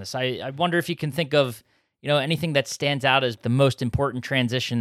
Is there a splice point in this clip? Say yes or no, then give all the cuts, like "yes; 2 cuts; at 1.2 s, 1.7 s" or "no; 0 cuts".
yes; 1 cut; at 3.4 s